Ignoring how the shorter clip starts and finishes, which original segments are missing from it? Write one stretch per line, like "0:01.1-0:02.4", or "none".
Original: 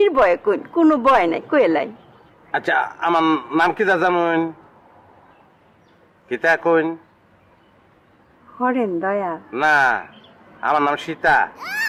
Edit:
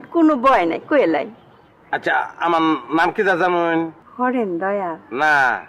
0:04.6-0:08.4